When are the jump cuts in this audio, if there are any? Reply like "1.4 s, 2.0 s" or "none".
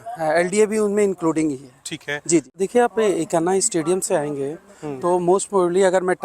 2.5 s